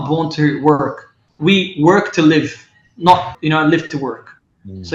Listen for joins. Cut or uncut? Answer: cut